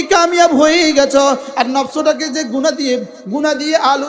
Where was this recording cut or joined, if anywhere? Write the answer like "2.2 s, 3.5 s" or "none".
none

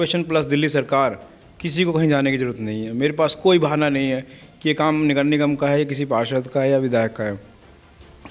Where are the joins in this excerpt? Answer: none

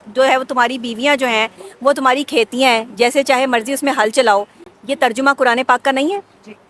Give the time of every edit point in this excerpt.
none

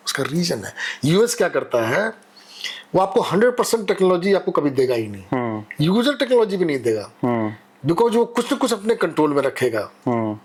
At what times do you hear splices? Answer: none

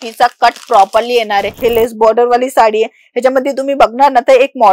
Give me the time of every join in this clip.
1.6 s

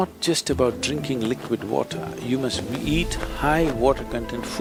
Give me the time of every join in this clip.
none

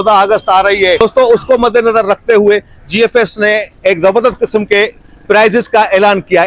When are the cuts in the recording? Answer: 1.0 s

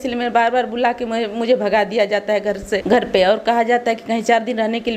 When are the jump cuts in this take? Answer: none

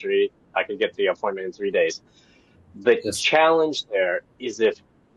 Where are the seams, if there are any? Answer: none

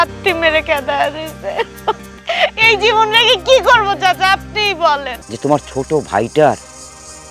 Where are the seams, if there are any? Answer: 2.1 s, 5.2 s

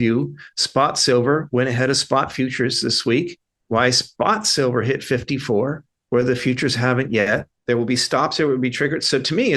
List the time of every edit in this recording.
7.5 s

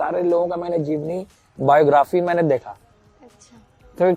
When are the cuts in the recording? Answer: none

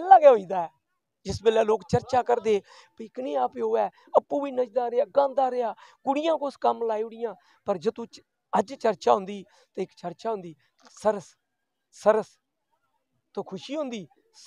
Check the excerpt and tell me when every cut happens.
none

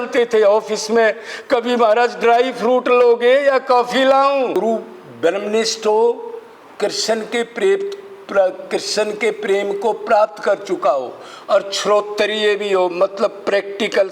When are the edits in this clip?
4.6 s

